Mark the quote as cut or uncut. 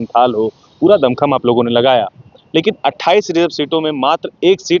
uncut